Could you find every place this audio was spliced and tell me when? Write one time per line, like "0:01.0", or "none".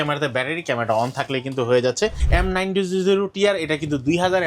0:02.2